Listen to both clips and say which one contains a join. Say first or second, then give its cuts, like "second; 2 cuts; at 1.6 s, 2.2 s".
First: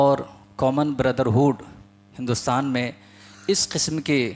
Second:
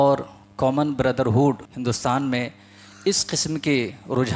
second; 1 cut; at 1.7 s